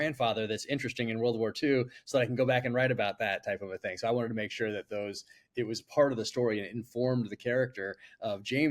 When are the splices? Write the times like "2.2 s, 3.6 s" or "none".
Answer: none